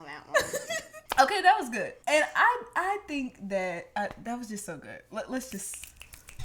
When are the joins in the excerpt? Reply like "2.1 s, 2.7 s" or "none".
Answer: none